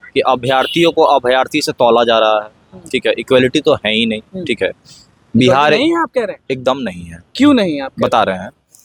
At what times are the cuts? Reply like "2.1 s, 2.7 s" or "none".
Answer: none